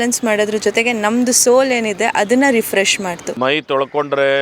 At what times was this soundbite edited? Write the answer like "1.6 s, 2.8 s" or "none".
3.2 s

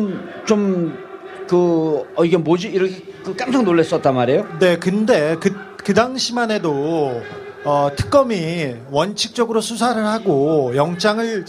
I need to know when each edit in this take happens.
5.8 s

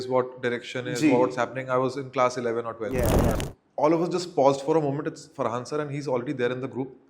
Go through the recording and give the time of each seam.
3.4 s

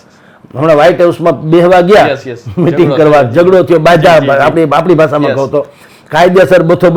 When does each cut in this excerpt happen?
none

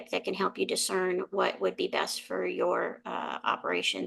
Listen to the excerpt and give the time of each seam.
none

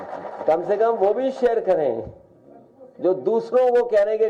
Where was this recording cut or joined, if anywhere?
none

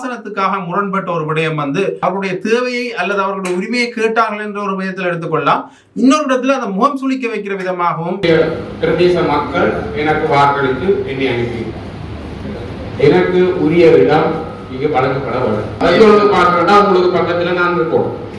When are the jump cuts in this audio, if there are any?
2.0 s, 8.2 s, 15.8 s

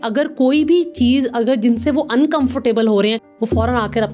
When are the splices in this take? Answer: none

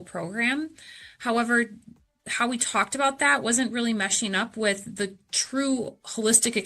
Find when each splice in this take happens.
2.2 s

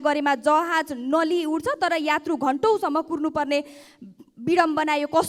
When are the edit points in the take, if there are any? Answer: none

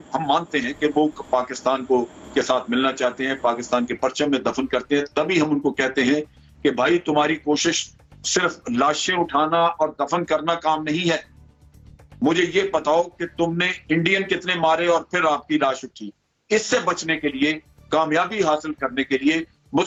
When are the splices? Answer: none

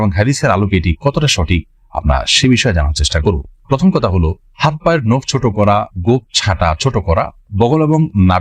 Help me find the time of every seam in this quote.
none

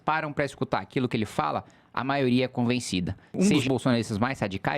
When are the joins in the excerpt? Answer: 3.4 s

